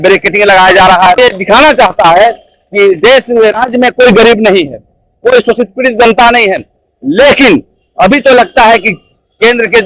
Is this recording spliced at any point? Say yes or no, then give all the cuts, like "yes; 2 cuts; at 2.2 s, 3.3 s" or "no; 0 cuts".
yes; 1 cut; at 1.2 s